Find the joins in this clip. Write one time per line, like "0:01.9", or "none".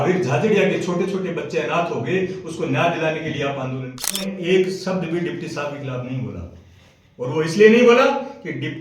0:04.3